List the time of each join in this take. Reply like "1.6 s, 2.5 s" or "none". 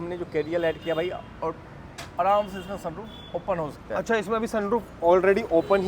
none